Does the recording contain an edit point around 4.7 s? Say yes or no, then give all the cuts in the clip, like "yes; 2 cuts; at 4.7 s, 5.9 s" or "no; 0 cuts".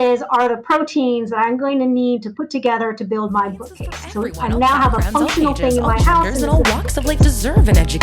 no; 1 cut; at 6.4 s